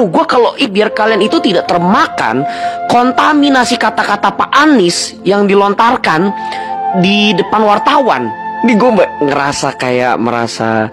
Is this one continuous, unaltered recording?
yes; 0 cuts

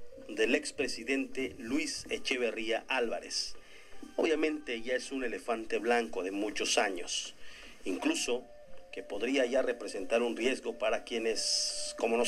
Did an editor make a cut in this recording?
no; 0 cuts

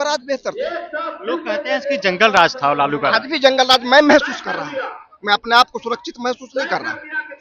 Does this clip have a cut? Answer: no; 0 cuts

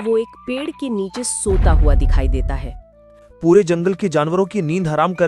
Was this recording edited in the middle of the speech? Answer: no; 0 cuts

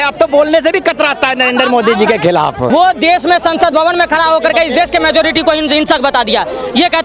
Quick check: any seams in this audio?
yes; 1 cut; at 2.7 s

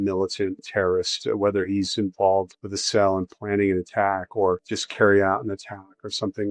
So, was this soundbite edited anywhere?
no; 0 cuts

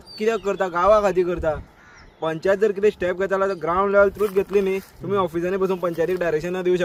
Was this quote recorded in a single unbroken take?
yes; 0 cuts

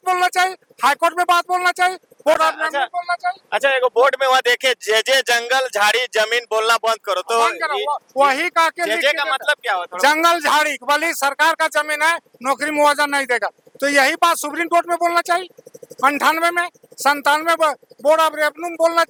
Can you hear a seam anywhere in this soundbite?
no; 0 cuts

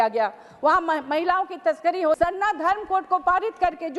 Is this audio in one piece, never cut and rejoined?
no; 1 cut; at 2.2 s

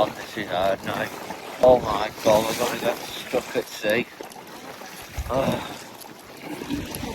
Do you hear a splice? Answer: yes; 1 cut; at 1.6 s

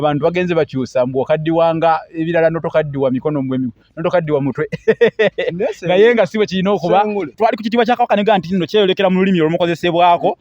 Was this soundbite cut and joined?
yes; 1 cut; at 7.3 s

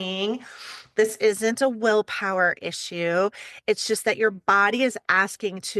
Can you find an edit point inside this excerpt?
no; 0 cuts

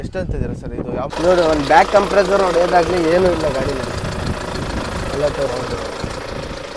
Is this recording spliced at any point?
yes; 1 cut; at 1.1 s

